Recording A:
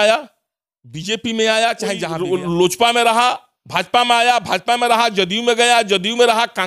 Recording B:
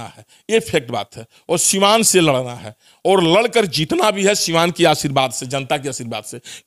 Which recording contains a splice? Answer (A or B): A